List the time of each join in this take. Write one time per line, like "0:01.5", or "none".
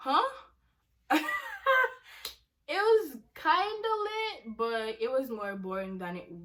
none